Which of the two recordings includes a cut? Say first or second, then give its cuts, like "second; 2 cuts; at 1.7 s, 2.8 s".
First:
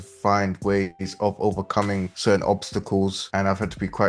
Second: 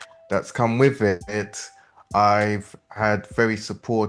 first; 2 cuts; at 2.1 s, 3.2 s